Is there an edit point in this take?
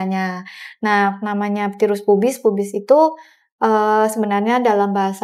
no; 0 cuts

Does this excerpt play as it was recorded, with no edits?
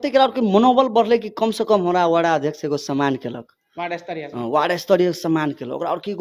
yes; 0 cuts

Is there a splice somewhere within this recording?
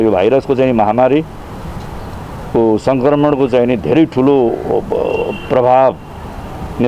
no; 0 cuts

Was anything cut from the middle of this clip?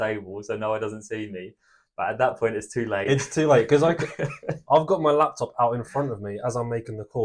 no; 0 cuts

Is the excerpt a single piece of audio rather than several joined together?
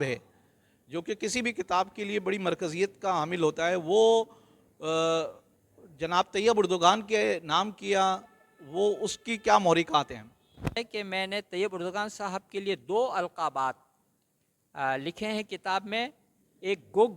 no; 1 cut; at 10.8 s

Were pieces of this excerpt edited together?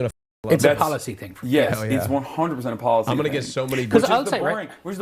no; 0 cuts

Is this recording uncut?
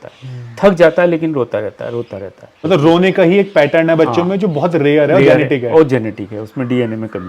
no; 1 cut; at 2.6 s

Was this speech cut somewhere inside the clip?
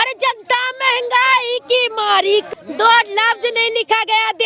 yes; 1 cut; at 2.5 s

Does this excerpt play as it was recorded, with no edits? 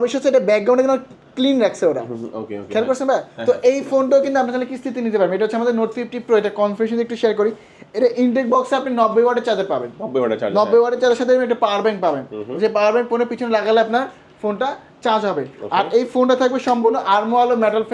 yes; 0 cuts

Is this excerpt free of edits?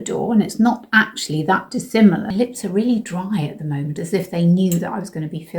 no; 2 cuts; at 2.3 s, 4.0 s

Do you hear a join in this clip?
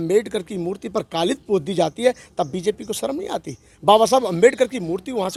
no; 0 cuts

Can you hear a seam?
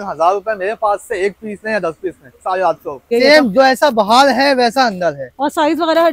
yes; 1 cut; at 3.1 s

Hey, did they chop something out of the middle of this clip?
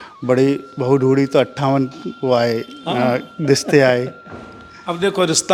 no; 0 cuts

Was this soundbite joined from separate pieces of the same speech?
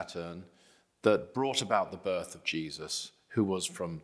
no; 0 cuts

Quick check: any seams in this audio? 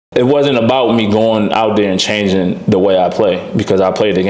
no; 0 cuts

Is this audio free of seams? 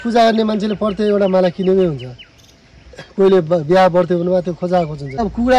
yes; 0 cuts

